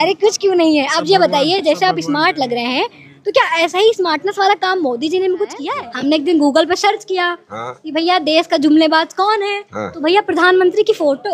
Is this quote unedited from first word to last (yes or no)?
no